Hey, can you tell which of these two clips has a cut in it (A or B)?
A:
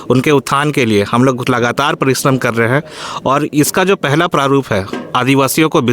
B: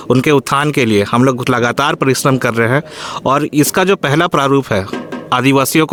A